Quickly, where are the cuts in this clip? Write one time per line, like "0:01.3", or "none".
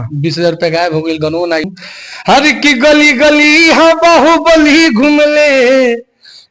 0:01.6